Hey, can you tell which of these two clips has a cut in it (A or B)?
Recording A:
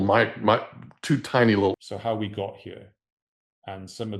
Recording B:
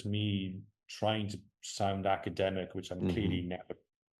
A